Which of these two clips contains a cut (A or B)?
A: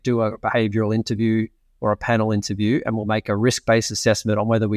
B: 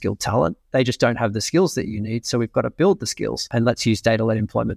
B